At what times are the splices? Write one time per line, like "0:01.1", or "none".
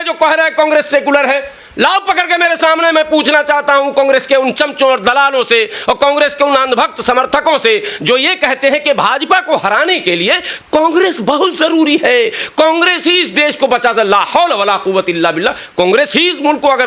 none